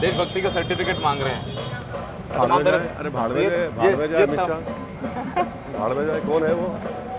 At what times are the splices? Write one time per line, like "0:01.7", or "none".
0:02.4